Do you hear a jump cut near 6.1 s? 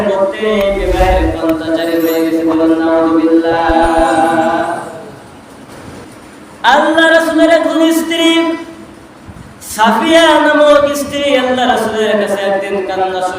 yes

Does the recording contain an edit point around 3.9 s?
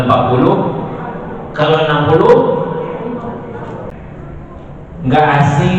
yes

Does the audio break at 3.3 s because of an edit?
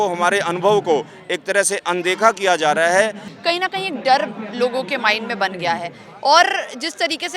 yes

